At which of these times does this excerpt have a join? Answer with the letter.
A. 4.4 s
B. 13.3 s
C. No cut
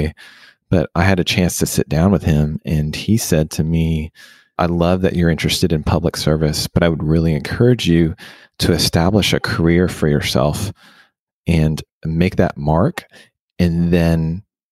A